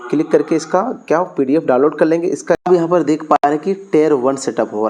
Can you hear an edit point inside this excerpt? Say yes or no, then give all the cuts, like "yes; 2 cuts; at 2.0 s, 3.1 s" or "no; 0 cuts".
yes; 1 cut; at 2.6 s